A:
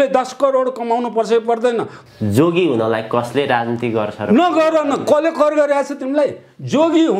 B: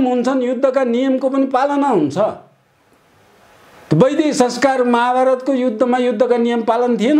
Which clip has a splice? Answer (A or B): A